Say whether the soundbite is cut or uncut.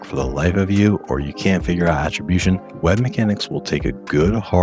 uncut